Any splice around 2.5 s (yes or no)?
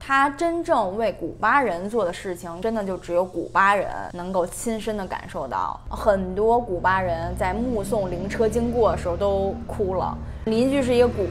yes